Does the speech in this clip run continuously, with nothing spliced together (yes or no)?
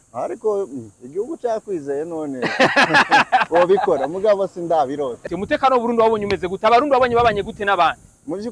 no